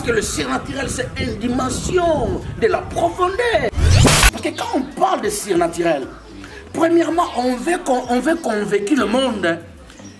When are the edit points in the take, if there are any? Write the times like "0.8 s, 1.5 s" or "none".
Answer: 4.1 s